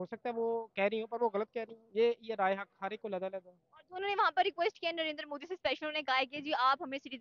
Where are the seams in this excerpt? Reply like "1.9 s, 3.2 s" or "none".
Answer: none